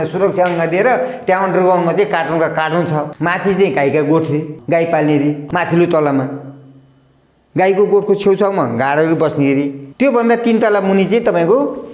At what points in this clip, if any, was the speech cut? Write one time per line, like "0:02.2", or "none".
0:03.1
0:04.5
0:05.4
0:09.8